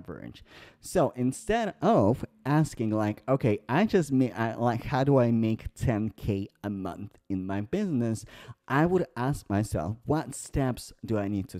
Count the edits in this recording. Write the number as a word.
zero